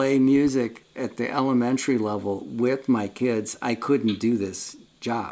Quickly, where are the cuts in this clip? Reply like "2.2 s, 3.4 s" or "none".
none